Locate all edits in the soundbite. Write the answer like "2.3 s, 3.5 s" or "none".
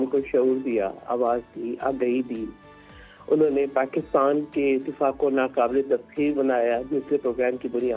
none